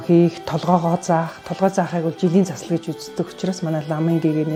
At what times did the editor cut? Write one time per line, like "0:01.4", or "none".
none